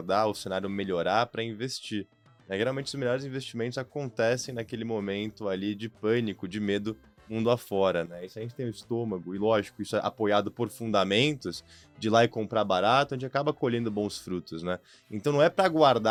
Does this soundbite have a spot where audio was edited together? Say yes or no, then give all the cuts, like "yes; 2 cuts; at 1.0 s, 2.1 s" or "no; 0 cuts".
no; 0 cuts